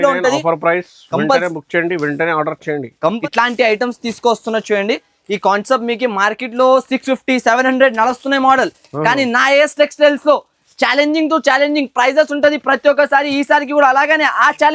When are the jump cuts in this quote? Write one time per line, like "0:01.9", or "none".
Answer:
0:03.1